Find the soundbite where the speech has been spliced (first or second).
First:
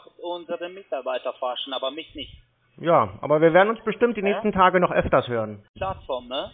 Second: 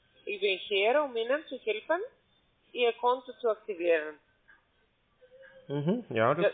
first